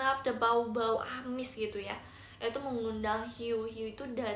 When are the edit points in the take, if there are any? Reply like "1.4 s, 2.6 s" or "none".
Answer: none